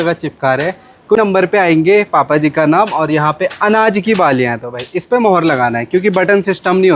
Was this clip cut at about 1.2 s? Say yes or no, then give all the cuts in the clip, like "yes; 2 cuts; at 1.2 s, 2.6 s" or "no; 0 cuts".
yes; 1 cut; at 1.2 s